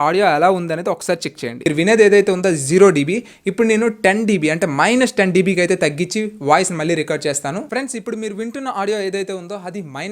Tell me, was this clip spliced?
yes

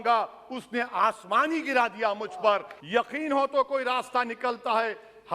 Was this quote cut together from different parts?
yes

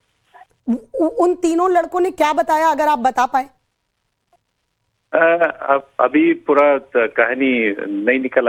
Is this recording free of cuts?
yes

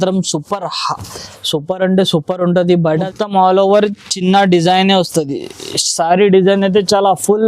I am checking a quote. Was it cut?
yes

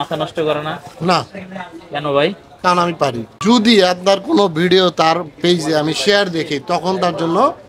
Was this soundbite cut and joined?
yes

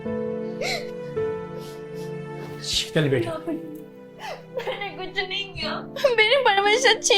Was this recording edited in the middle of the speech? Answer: no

